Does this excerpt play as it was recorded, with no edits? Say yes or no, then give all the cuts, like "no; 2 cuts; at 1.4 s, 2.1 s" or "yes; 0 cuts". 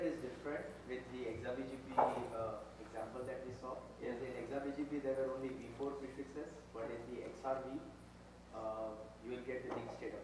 no; 1 cut; at 5.3 s